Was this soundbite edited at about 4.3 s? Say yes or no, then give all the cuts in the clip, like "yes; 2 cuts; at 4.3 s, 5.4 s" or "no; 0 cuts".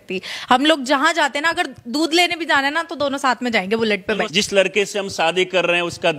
yes; 1 cut; at 4.3 s